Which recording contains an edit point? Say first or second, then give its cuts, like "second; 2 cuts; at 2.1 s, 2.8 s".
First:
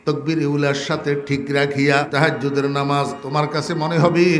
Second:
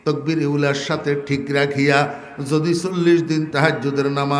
first; 2 cuts; at 2.1 s, 3.2 s